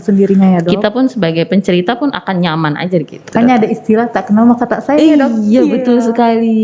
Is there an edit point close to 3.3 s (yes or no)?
yes